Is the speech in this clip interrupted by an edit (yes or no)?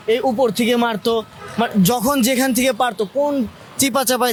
no